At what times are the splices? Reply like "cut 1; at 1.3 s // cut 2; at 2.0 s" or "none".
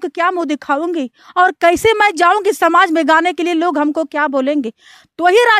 none